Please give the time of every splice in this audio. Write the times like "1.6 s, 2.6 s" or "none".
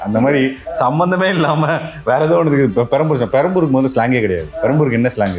4.5 s